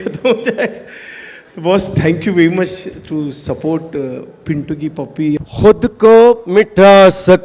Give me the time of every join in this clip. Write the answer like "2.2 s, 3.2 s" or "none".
5.4 s